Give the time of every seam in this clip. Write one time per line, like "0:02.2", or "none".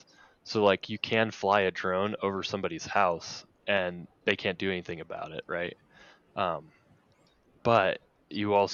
none